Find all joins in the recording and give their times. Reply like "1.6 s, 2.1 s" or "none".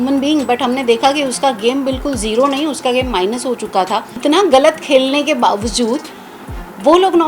4.1 s